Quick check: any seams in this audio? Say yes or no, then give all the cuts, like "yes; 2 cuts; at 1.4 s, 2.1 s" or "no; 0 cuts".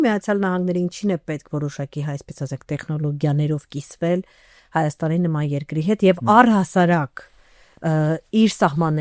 no; 0 cuts